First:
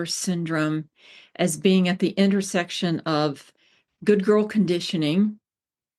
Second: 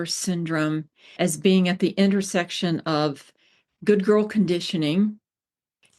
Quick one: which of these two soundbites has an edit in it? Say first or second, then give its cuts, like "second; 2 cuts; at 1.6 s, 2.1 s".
second; 1 cut; at 1.0 s